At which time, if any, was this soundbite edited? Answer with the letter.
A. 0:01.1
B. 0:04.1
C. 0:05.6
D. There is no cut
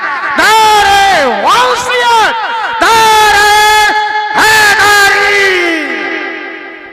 D